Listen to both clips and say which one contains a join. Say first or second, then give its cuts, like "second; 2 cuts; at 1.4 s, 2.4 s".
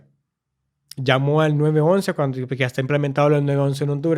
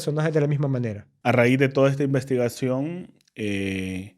second; 1 cut; at 1.0 s